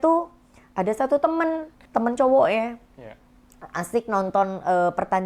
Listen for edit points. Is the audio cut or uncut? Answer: cut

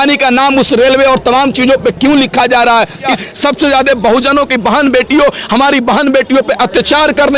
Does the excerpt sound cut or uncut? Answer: cut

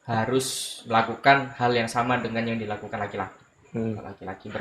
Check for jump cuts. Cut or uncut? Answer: uncut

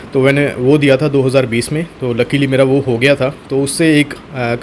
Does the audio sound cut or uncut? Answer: uncut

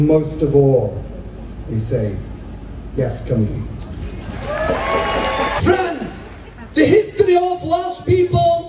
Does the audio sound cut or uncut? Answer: cut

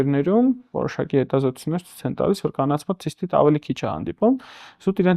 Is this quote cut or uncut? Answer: uncut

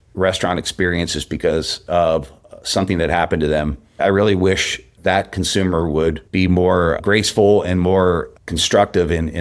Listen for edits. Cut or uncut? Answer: cut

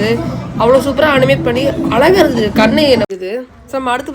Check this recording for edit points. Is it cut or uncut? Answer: cut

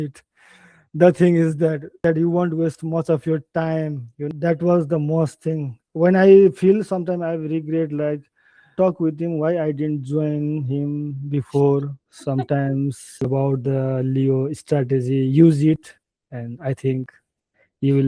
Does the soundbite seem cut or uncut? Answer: cut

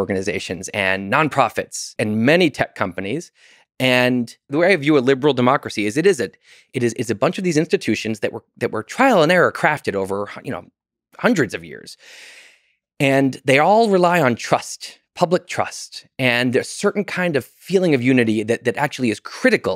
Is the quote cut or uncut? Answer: cut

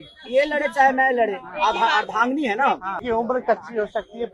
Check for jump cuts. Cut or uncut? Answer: cut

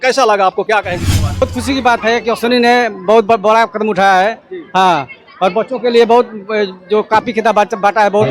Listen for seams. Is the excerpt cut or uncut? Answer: cut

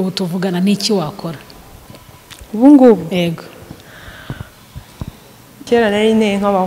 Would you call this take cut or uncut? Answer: cut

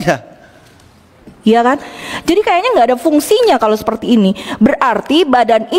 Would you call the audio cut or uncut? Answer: cut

